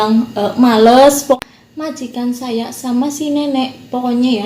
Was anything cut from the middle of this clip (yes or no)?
yes